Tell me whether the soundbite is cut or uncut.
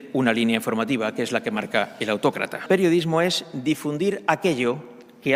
cut